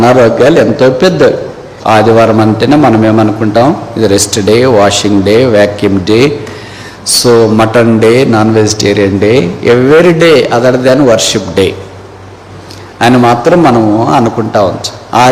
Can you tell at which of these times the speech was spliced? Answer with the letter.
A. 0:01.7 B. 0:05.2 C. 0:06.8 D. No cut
A